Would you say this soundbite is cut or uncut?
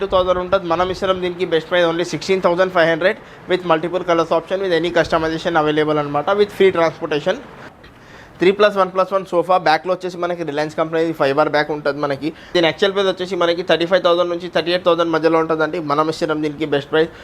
cut